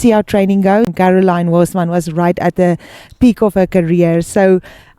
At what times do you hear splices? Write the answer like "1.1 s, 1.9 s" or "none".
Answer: 0.9 s